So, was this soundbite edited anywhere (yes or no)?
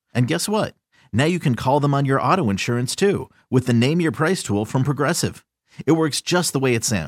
no